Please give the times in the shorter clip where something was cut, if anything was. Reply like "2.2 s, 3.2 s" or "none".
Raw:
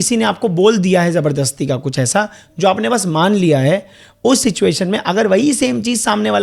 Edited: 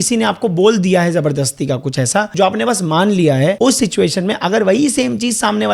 2.3 s, 3.6 s